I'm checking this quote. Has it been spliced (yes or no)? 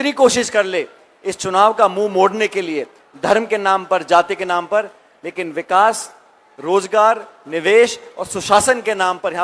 no